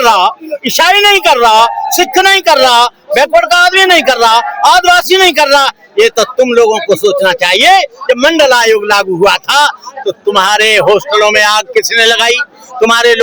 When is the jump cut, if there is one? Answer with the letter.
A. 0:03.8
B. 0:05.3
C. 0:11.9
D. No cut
D